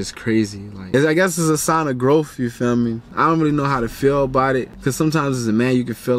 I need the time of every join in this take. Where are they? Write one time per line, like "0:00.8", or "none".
0:00.9
0:03.1
0:04.7